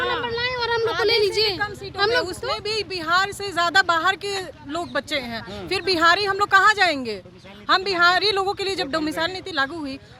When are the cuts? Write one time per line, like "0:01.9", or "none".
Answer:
none